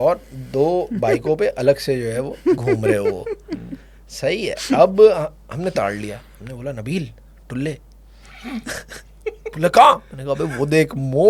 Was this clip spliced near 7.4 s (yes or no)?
no